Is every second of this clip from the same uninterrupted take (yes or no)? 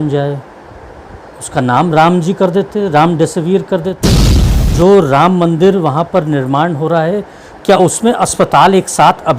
no